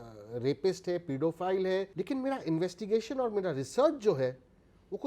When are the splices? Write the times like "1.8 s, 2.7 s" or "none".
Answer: 1.9 s